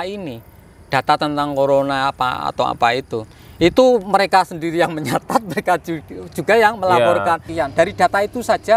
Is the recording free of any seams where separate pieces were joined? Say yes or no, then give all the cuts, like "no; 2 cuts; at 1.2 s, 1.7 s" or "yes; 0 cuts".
no; 1 cut; at 7.5 s